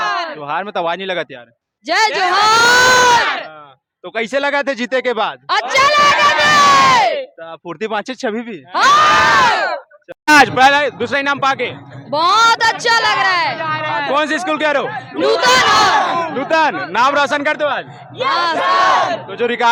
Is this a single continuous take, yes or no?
yes